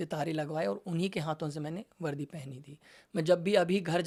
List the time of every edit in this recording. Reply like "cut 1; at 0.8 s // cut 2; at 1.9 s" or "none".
none